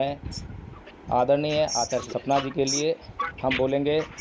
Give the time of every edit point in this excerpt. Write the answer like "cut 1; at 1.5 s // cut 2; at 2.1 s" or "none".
cut 1; at 2.1 s

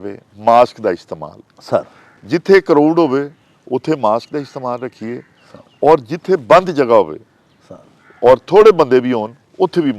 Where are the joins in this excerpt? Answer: none

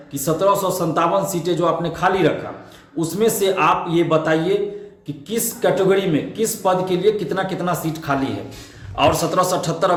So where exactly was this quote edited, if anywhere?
none

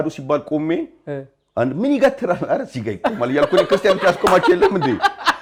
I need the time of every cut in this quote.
none

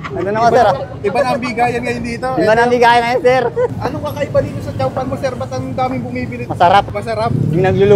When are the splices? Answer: cut 1; at 3.7 s // cut 2; at 6.4 s // cut 3; at 7.0 s

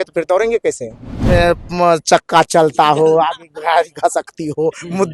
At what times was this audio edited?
cut 1; at 1.1 s

